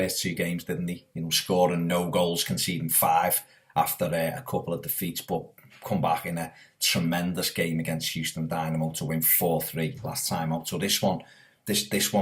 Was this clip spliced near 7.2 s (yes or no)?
yes